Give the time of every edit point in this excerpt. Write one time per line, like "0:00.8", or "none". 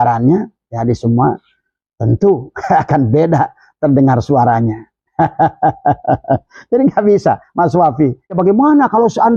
0:08.3